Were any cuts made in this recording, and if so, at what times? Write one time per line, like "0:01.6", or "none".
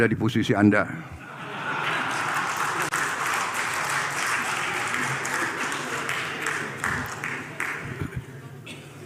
none